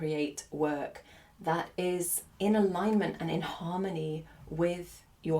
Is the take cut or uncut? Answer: cut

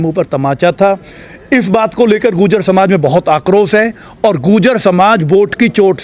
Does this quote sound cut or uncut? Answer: uncut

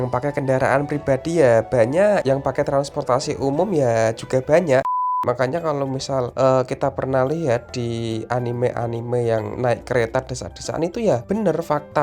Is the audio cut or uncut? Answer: cut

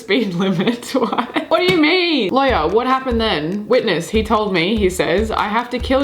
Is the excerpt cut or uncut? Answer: cut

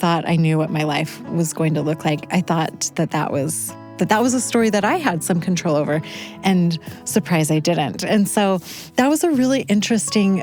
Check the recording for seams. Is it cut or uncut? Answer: uncut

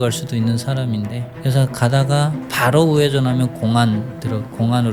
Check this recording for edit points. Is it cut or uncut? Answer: cut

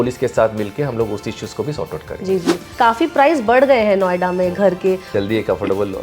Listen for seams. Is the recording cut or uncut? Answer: cut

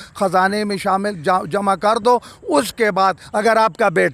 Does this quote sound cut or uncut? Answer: cut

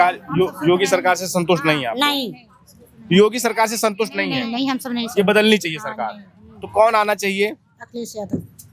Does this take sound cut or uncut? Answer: uncut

